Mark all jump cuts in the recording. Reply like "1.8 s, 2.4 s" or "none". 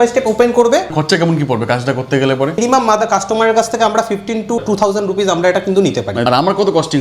1.0 s, 2.6 s, 4.6 s, 6.2 s

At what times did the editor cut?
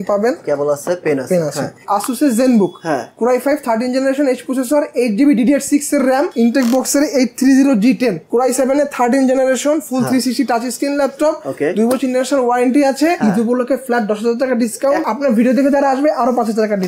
1.8 s, 6.3 s, 8.2 s, 13.2 s, 15.0 s

